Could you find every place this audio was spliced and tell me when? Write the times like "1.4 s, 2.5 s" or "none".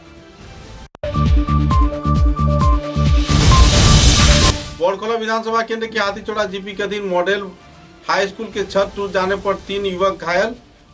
0.9 s, 4.5 s